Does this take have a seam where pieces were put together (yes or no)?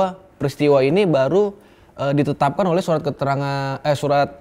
no